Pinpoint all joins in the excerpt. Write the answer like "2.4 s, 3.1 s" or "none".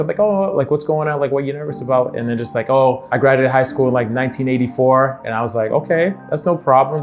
3.0 s

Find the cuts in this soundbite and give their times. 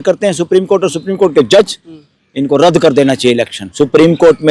3.6 s

